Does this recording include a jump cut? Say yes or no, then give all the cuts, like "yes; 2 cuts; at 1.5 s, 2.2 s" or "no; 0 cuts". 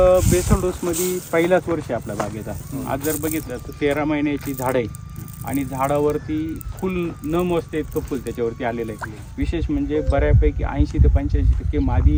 no; 0 cuts